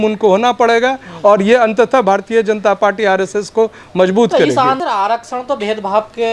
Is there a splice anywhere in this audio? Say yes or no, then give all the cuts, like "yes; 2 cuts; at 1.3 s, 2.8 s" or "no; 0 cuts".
yes; 1 cut; at 4.8 s